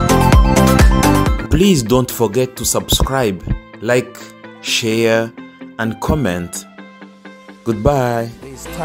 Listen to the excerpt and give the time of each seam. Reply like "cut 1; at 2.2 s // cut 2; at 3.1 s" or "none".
none